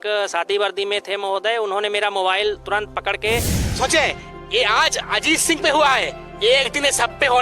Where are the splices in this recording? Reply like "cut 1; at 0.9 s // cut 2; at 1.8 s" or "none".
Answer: cut 1; at 3.8 s